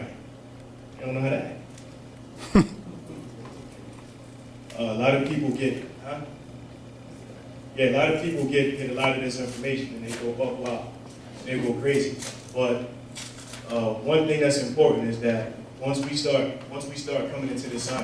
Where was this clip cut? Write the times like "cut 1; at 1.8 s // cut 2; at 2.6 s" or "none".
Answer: cut 1; at 7.6 s